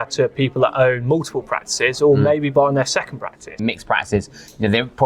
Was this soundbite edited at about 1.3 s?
no; 1 cut; at 3.6 s

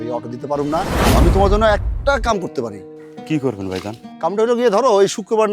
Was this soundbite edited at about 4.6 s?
no; 1 cut; at 1.1 s

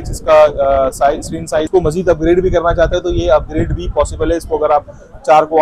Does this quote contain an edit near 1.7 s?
yes; 1 cut; at 1.7 s

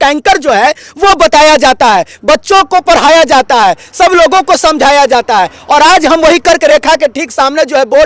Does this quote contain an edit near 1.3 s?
no; 0 cuts

